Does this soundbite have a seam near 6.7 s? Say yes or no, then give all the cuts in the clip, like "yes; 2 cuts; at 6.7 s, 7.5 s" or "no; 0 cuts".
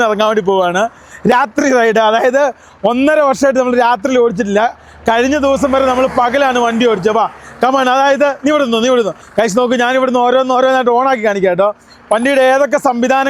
no; 0 cuts